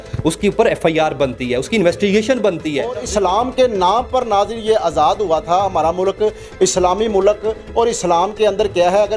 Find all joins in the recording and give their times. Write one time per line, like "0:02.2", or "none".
0:03.0